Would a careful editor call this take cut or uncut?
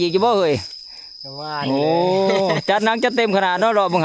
uncut